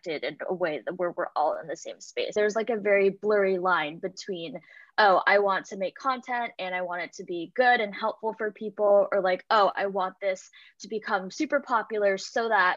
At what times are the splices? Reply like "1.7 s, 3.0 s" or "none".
2.3 s

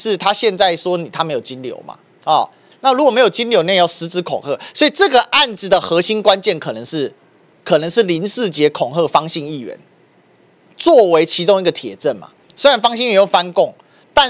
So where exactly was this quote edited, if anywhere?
none

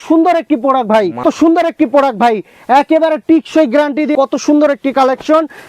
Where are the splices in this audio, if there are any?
1.2 s, 4.1 s

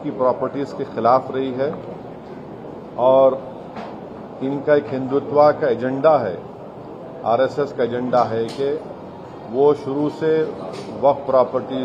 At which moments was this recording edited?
none

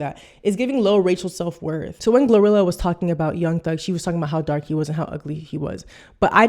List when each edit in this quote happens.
1.9 s

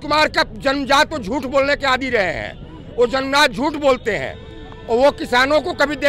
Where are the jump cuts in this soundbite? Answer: none

